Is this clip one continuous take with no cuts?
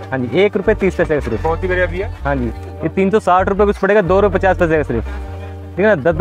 no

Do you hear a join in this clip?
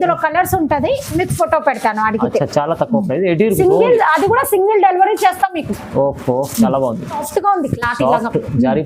yes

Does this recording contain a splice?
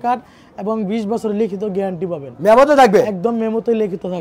no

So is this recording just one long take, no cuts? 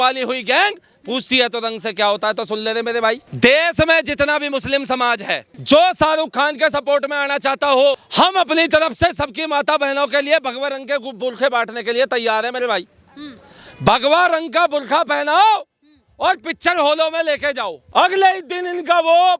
no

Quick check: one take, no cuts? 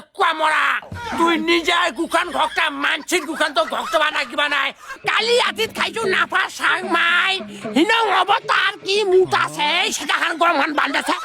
no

